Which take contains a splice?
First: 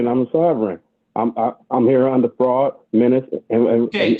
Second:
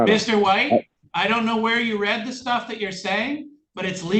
second; 1 cut; at 1.0 s

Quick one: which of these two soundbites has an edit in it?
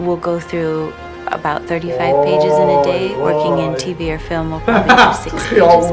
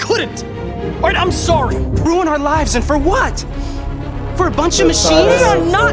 second; 1 cut; at 2.0 s

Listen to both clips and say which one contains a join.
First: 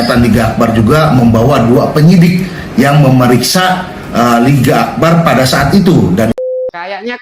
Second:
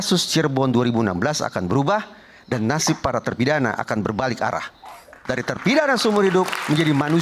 first; 1 cut; at 6.3 s

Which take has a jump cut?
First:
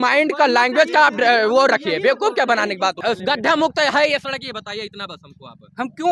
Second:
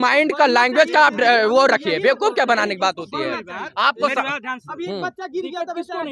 first; 1 cut; at 3.0 s

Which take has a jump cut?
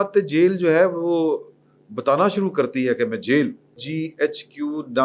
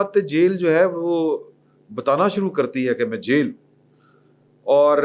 first; 1 cut; at 3.9 s

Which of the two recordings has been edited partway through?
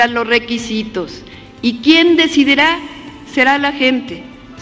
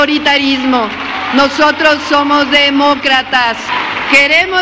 second; 1 cut; at 3.6 s

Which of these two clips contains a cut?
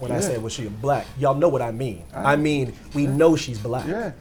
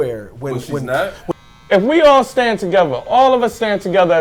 second; 1 cut; at 1.2 s

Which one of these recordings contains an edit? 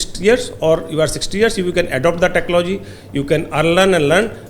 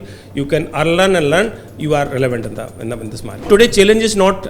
second; 1 cut; at 3.5 s

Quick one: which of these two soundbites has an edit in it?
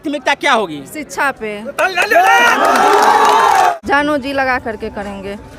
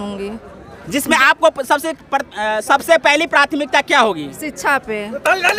first; 1 cut; at 3.7 s

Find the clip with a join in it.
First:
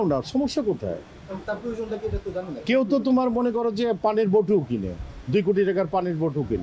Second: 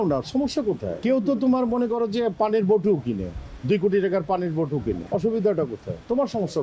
second; 2 cuts; at 1.0 s, 5.0 s

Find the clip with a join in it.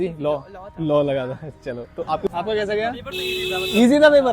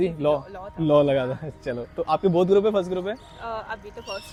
first; 1 cut; at 2.3 s

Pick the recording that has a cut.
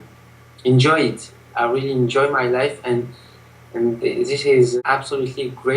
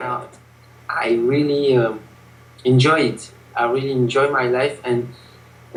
first; 1 cut; at 4.8 s

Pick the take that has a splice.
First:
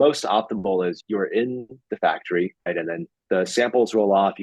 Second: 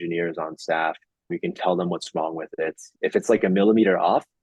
first; 2 cuts; at 1.0 s, 2.6 s

